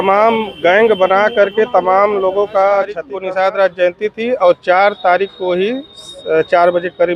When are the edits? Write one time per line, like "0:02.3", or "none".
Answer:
0:03.1